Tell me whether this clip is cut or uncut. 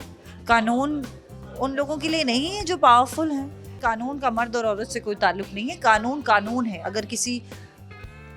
cut